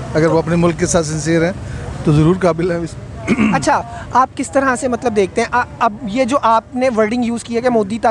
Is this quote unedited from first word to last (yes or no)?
yes